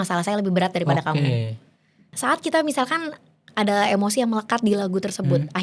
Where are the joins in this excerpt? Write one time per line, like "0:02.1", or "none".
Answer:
0:02.1

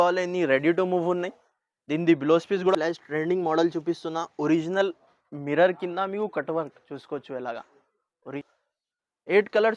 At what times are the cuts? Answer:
0:02.7
0:08.4

